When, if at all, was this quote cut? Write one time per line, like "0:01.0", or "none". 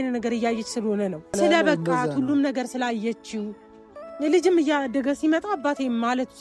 0:01.4